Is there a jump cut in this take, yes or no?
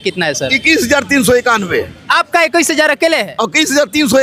no